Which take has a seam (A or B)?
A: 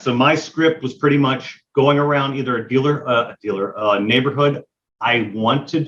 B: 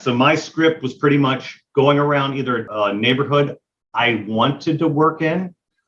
B